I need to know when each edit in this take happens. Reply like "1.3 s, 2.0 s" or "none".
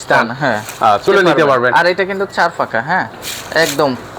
1.1 s